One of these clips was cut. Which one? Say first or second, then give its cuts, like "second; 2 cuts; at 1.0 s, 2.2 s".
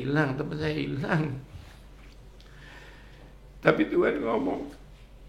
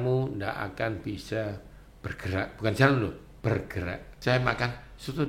second; 1 cut; at 4.0 s